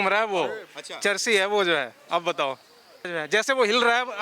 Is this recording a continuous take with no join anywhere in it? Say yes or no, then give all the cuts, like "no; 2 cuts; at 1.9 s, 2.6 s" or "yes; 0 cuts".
no; 1 cut; at 3.1 s